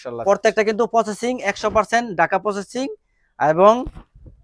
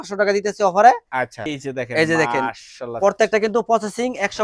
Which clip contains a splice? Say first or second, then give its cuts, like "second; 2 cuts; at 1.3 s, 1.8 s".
second; 1 cut; at 1.5 s